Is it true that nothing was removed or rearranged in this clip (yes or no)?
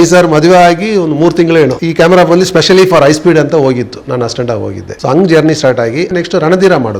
no